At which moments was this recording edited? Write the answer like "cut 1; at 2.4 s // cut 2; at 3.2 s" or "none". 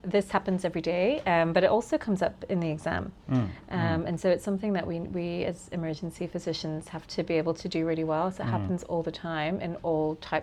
none

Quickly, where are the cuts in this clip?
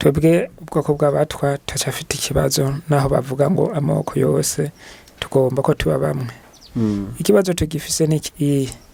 none

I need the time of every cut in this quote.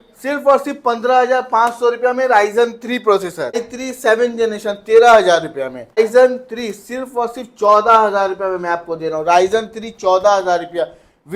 cut 1; at 3.7 s // cut 2; at 6.0 s

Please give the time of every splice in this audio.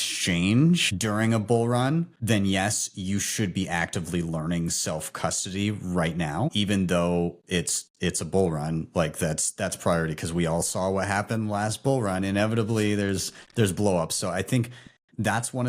cut 1; at 2.1 s

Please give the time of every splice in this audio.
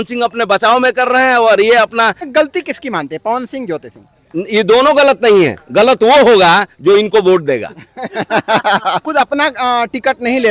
cut 1; at 2.2 s // cut 2; at 9.0 s

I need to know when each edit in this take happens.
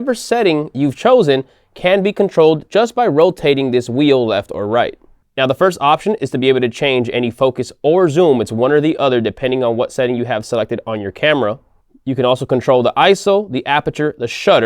cut 1; at 11.8 s

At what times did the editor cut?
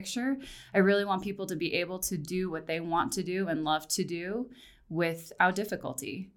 none

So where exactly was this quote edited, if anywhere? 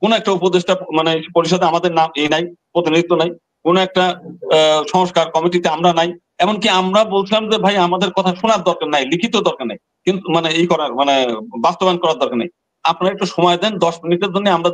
none

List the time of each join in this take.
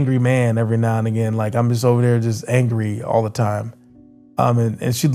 none

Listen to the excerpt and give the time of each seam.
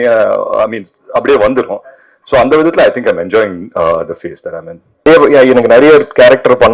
cut 1; at 5.1 s

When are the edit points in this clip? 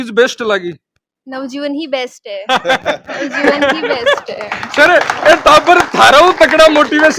none

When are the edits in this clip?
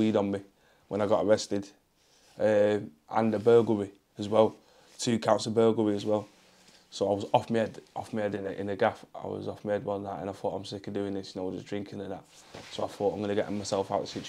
none

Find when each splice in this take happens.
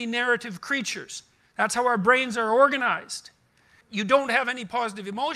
cut 1; at 3.8 s

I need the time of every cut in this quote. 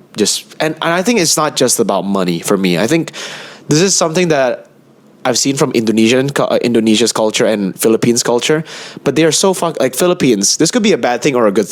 none

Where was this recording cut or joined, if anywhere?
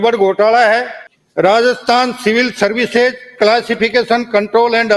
cut 1; at 1.0 s

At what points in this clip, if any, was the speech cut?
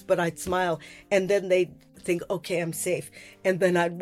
cut 1; at 0.9 s // cut 2; at 1.9 s

